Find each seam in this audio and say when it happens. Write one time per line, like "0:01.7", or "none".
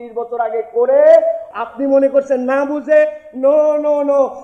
0:01.5

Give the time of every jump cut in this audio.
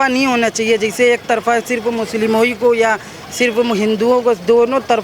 none

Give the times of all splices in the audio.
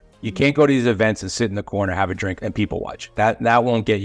0:02.4

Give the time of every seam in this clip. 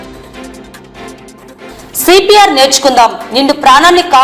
0:01.0

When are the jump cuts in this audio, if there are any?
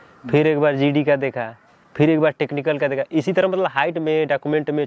none

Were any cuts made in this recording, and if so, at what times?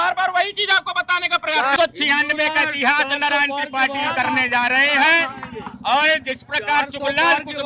0:01.8

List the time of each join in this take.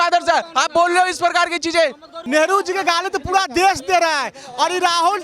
0:02.1

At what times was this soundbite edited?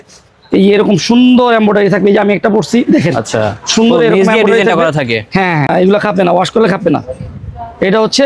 0:05.7

